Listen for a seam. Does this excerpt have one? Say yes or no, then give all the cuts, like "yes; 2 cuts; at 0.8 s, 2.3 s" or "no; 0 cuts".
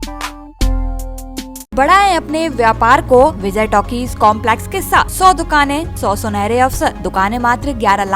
yes; 5 cuts; at 1.7 s, 3.4 s, 5.1 s, 5.9 s, 7.0 s